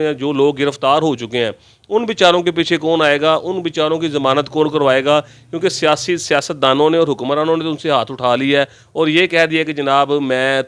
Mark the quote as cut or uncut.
uncut